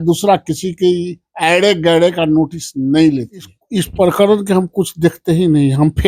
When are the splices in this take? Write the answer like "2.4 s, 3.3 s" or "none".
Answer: 3.6 s